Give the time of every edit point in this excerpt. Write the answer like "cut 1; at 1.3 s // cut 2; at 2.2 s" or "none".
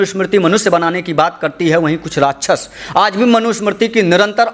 none